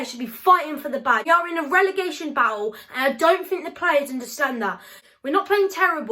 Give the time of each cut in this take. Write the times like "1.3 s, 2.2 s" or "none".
1.2 s, 5.0 s